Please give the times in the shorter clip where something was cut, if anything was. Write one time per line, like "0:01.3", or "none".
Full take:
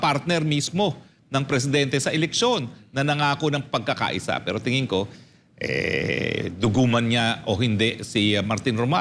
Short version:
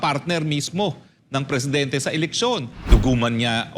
0:02.8